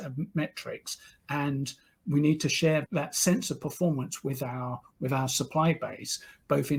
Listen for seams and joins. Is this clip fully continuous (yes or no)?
yes